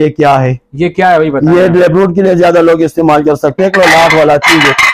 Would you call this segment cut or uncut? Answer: cut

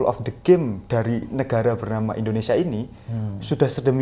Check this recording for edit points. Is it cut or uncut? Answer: uncut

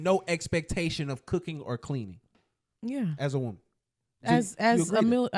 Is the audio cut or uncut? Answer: uncut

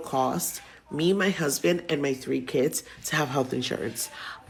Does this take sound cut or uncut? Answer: uncut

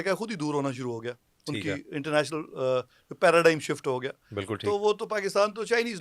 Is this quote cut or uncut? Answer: uncut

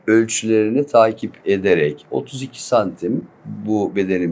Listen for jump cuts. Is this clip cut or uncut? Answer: uncut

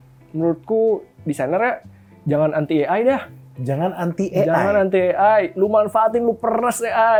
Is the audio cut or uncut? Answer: uncut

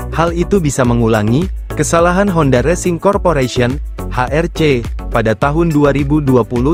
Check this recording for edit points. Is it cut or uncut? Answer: uncut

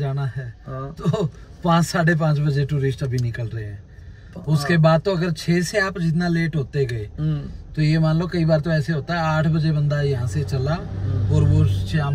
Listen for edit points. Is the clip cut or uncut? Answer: uncut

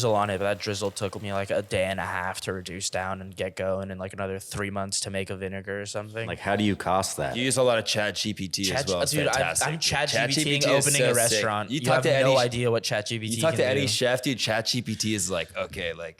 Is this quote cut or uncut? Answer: cut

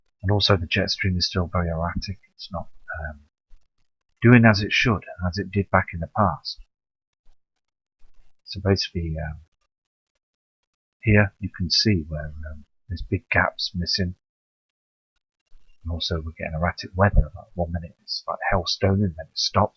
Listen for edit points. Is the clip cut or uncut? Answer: uncut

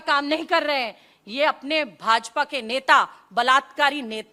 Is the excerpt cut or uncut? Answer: uncut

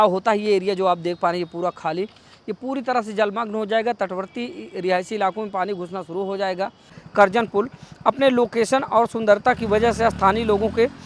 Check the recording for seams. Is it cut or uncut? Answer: cut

